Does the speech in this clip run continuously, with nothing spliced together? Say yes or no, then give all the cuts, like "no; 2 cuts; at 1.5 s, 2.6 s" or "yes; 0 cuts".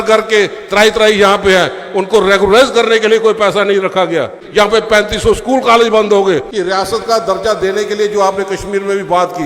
no; 2 cuts; at 4.4 s, 6.5 s